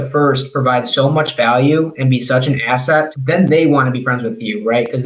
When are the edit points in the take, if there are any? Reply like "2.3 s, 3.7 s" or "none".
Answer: none